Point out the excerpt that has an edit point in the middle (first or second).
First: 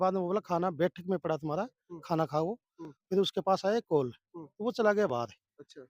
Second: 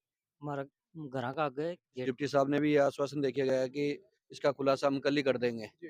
second